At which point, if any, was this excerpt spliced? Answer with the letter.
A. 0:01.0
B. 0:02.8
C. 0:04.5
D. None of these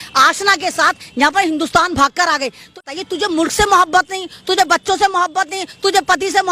B